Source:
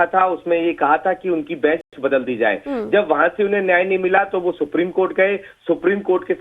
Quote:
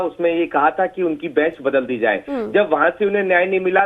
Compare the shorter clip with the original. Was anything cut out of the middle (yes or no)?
yes